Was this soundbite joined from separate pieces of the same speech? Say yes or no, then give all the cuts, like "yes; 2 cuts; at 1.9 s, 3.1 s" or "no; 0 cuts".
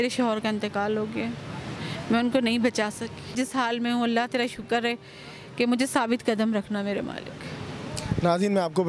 yes; 1 cut; at 3.3 s